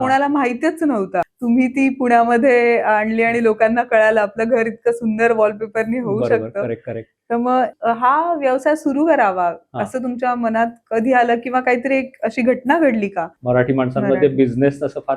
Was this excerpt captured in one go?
no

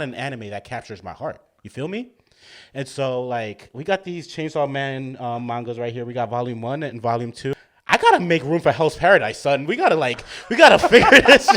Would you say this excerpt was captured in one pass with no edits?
no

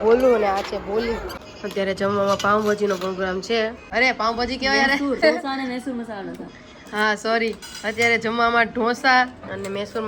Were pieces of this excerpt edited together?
yes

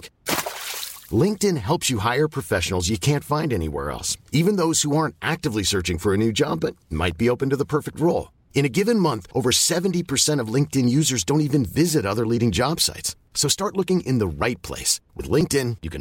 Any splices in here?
no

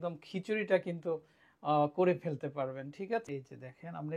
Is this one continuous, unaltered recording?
no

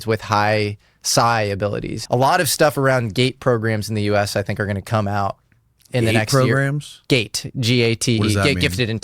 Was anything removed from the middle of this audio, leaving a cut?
yes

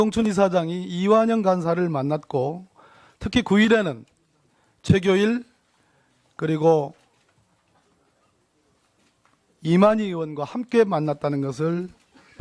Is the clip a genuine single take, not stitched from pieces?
yes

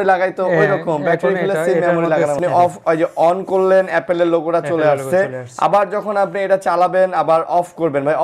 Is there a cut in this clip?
yes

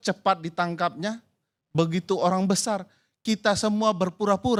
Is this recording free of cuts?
yes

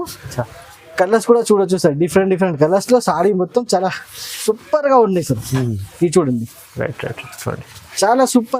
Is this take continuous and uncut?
yes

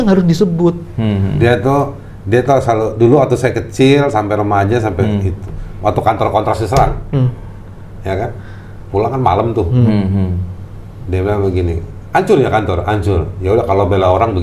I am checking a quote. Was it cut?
no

